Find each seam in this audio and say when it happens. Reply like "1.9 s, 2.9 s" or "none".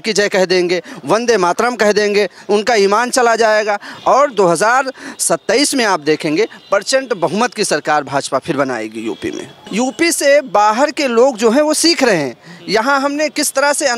3.9 s, 9.6 s